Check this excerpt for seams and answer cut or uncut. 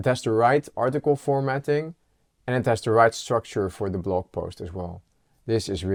uncut